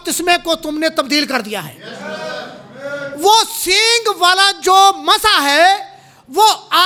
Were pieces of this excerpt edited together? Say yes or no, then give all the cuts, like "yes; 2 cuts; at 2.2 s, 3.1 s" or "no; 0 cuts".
no; 0 cuts